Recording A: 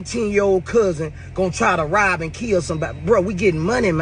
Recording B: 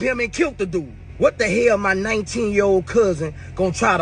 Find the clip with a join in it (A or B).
B